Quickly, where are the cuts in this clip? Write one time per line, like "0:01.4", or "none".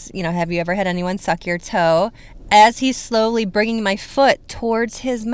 none

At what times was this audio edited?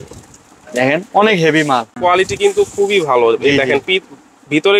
0:01.9

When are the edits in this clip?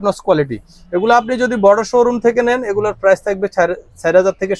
none

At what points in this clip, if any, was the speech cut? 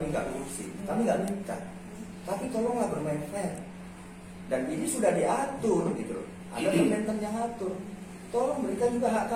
none

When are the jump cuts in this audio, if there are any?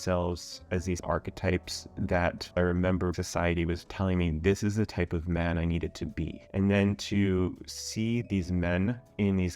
0:01.0

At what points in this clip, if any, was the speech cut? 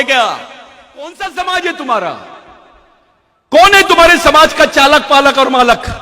0:01.1

